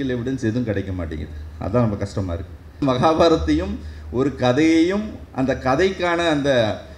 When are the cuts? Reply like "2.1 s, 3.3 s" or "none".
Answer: 2.8 s